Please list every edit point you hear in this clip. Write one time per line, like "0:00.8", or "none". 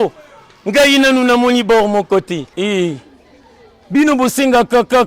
0:02.5